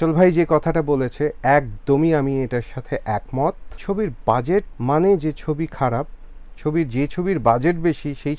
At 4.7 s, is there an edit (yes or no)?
yes